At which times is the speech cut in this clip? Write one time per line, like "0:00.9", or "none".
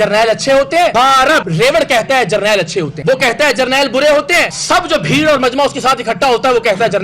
0:01.2